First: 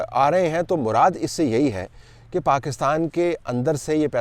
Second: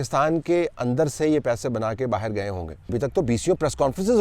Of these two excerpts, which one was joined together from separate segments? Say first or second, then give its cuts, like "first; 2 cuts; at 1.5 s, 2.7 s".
second; 1 cut; at 2.9 s